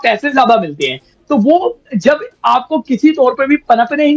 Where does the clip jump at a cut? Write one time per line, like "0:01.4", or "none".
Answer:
none